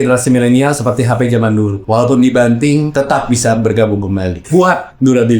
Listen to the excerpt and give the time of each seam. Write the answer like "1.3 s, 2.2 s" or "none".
1.8 s, 2.9 s, 4.4 s